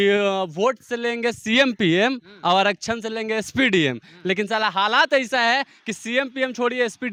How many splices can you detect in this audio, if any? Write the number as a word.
zero